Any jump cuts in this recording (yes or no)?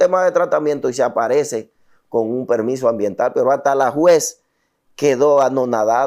no